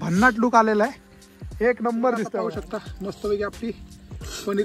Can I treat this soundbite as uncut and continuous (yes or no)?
no